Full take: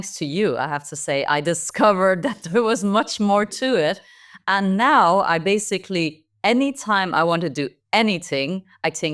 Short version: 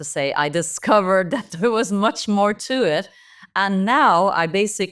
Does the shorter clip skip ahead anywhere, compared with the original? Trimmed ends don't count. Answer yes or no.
no